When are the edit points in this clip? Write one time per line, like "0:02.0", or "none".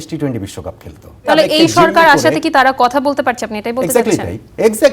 0:01.3